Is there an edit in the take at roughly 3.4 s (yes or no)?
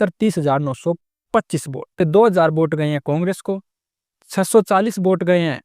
no